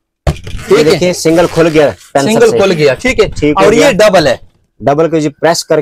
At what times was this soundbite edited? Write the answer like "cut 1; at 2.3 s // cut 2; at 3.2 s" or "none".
none